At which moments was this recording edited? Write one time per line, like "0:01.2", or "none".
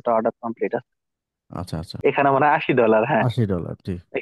0:01.8